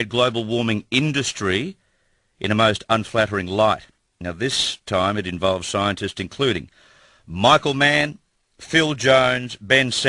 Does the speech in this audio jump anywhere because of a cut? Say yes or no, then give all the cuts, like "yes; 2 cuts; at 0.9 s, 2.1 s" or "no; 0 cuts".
yes; 1 cut; at 7.3 s